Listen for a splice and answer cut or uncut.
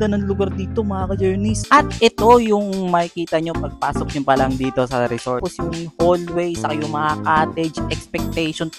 cut